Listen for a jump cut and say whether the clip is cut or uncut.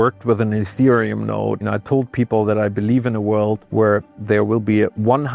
cut